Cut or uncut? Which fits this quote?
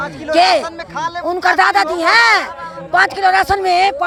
uncut